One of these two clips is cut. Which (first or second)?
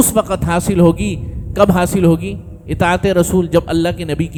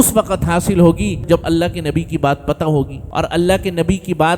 second